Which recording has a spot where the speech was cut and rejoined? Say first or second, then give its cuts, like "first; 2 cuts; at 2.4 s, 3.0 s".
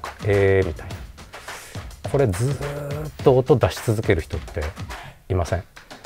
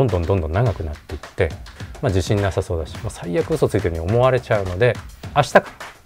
second; 2 cuts; at 1.7 s, 5.1 s